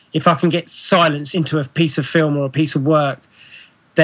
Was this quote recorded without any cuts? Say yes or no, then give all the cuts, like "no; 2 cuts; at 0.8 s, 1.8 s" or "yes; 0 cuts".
no; 1 cut; at 1.2 s